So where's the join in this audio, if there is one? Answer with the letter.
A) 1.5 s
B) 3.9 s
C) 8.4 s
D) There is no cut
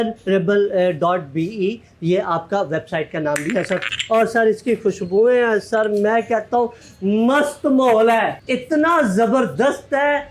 B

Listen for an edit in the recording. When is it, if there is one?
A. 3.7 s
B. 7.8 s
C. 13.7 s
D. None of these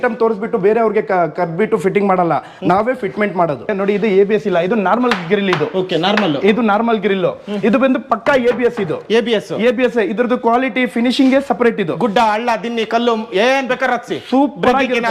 A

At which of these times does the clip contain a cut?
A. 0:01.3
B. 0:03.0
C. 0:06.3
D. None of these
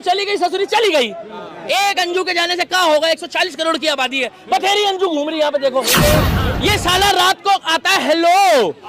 C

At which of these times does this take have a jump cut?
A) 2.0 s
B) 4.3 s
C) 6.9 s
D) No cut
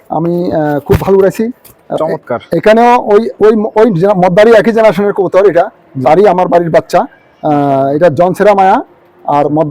A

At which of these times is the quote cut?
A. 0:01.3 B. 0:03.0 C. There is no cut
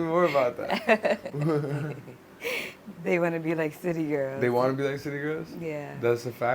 C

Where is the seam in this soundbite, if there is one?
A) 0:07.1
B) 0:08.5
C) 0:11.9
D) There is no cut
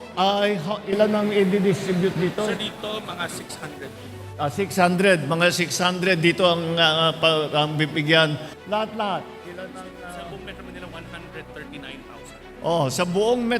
B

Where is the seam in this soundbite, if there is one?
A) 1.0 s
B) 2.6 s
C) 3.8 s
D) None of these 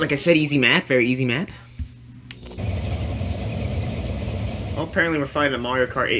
B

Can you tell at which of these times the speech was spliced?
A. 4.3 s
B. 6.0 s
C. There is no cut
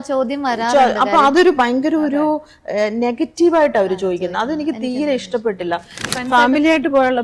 B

